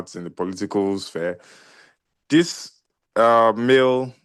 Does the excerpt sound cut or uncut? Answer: uncut